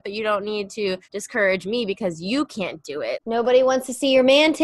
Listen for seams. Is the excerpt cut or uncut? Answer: cut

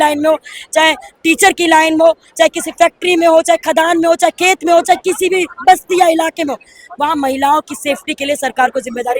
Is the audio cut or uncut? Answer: uncut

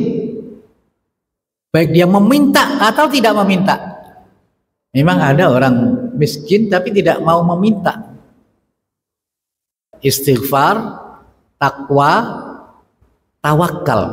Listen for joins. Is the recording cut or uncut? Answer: cut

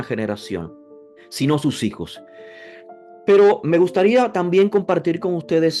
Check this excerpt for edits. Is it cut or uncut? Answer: uncut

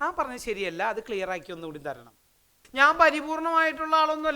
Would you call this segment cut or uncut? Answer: cut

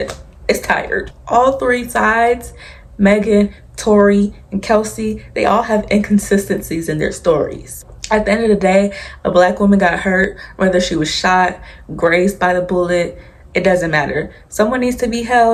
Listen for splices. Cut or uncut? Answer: uncut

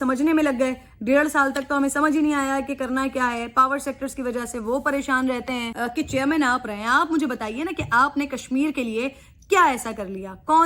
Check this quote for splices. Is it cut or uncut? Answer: cut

